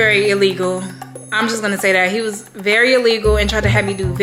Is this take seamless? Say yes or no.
yes